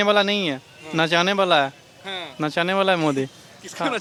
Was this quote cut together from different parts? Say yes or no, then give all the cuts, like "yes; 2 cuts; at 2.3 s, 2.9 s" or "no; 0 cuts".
no; 0 cuts